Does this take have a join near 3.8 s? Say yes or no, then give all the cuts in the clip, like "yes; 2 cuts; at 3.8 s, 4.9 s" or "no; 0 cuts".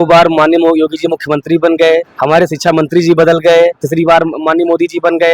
yes; 2 cuts; at 2.1 s, 3.8 s